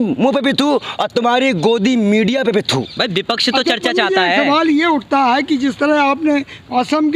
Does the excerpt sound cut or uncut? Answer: uncut